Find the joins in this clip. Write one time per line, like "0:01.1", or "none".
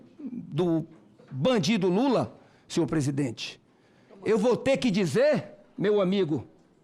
0:04.1